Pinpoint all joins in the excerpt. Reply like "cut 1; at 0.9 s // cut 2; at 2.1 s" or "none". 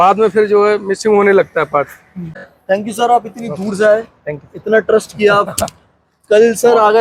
cut 1; at 2.5 s